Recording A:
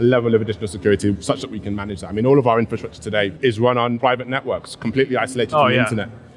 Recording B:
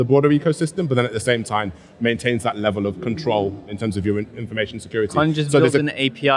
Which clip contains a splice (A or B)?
A